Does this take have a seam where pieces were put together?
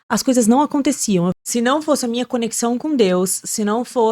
yes; 1 cut; at 1.4 s

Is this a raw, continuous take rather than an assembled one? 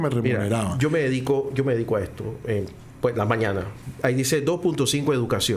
no; 1 cut; at 3.8 s

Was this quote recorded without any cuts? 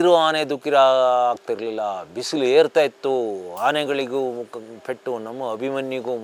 yes; 0 cuts

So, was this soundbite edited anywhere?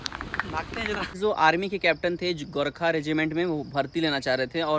yes; 1 cut; at 1.2 s

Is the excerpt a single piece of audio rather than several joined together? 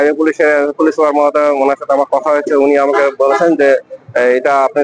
yes; 0 cuts

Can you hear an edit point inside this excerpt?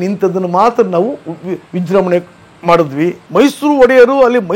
yes; 1 cut; at 3.2 s

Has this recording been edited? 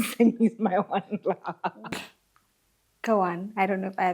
yes; 1 cut; at 1.8 s

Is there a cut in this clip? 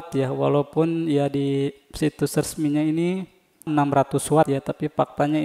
no; 0 cuts

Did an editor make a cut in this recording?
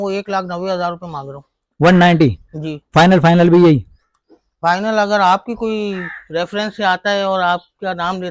no; 0 cuts

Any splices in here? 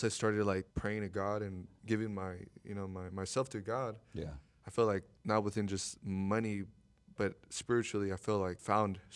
no; 0 cuts

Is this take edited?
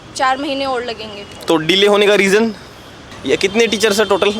yes; 1 cut; at 3.1 s

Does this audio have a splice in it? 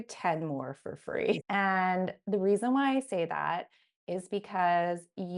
yes; 1 cut; at 1.4 s

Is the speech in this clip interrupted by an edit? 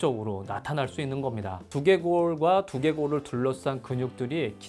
yes; 1 cut; at 1.6 s

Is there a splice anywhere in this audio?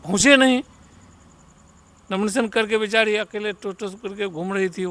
no; 0 cuts

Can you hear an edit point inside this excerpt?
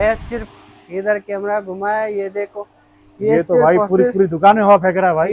no; 0 cuts

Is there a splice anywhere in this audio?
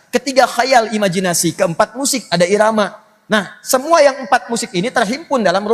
no; 0 cuts

